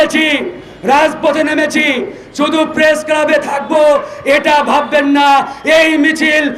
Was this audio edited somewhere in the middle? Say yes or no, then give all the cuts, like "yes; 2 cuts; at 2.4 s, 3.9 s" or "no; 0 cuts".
no; 0 cuts